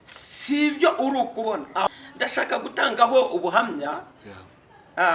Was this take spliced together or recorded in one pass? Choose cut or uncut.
cut